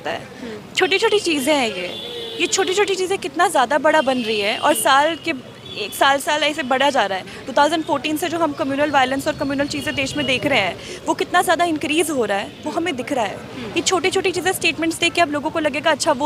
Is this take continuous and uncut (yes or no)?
yes